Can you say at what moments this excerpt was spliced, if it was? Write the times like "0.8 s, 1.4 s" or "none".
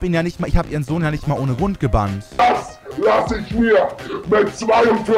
2.4 s